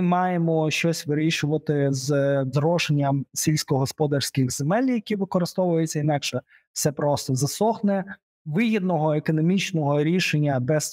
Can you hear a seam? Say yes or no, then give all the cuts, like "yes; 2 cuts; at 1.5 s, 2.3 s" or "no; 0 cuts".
no; 0 cuts